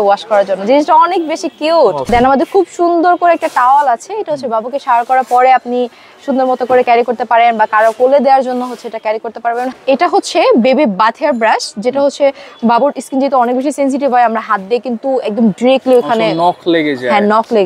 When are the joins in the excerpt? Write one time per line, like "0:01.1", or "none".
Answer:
0:02.0
0:09.7